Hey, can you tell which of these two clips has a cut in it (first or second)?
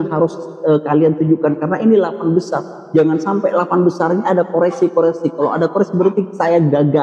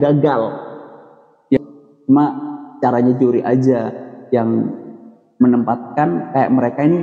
second